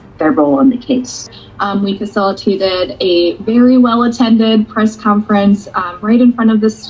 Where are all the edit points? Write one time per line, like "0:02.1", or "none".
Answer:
0:01.3